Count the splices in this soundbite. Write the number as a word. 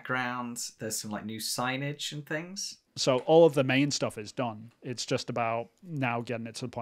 one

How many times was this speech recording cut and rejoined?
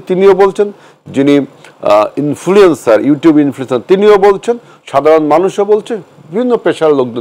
zero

